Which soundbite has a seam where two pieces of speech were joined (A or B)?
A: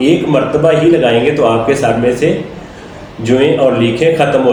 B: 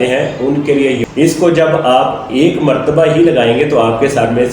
B